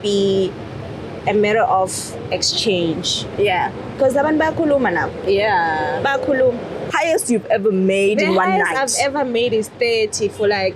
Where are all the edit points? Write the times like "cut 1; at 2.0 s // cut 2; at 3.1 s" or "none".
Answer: cut 1; at 3.9 s // cut 2; at 6.8 s